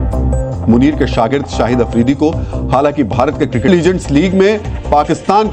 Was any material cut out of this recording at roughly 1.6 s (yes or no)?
no